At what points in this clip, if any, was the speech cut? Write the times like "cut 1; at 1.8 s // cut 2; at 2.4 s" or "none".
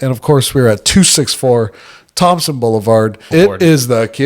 cut 1; at 3.3 s